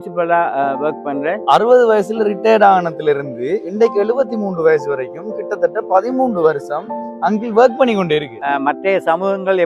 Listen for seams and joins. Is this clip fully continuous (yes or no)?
no